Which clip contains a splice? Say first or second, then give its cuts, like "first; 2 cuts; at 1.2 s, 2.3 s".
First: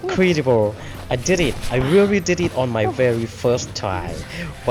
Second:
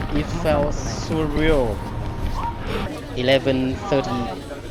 second; 1 cut; at 2.9 s